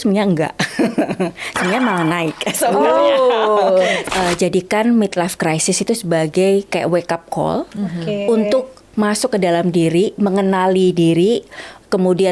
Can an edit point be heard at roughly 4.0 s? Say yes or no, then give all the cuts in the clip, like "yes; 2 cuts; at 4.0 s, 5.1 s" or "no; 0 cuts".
yes; 1 cut; at 4.0 s